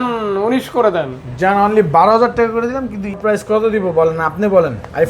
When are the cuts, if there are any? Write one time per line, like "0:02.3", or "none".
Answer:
0:03.2